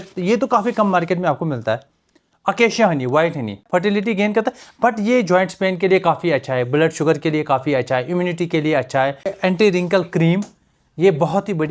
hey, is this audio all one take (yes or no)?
no